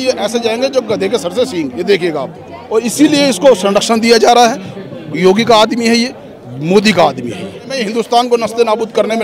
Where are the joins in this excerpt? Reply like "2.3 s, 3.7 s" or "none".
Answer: 2.6 s, 7.8 s